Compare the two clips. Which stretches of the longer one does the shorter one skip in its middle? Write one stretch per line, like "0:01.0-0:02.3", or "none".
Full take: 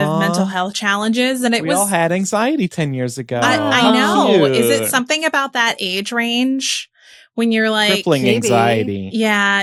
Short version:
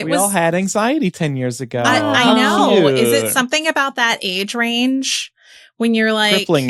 none